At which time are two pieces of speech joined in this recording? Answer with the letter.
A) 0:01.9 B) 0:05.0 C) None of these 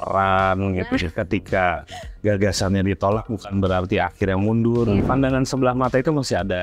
B